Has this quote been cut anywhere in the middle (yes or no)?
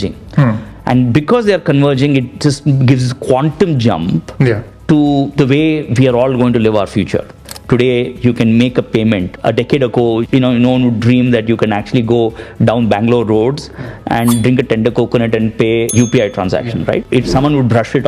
yes